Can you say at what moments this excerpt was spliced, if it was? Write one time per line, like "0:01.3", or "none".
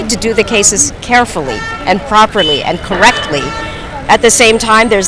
none